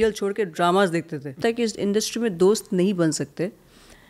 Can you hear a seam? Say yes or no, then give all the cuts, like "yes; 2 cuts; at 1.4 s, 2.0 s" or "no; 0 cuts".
yes; 1 cut; at 1.4 s